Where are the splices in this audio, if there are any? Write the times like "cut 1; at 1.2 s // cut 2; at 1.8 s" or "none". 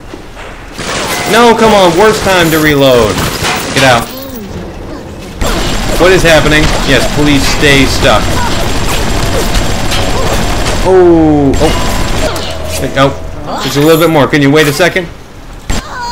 none